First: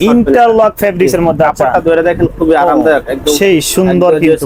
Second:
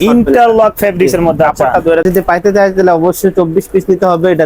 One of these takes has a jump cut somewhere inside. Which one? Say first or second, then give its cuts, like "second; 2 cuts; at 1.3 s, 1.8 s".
second; 1 cut; at 2.0 s